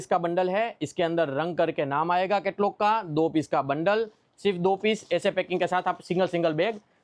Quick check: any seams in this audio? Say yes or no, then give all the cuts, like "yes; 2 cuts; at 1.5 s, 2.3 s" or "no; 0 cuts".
no; 0 cuts